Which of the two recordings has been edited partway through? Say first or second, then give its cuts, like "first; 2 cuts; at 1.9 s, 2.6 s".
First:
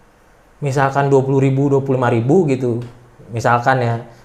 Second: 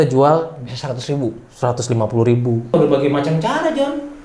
second; 1 cut; at 2.7 s